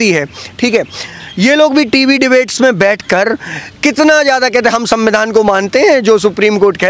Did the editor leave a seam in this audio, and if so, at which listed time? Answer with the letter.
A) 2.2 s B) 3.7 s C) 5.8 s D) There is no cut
D